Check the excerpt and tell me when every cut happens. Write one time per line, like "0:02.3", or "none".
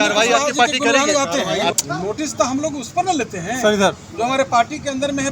0:01.7